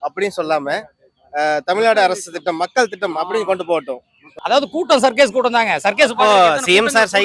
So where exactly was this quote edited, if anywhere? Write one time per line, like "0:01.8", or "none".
0:04.3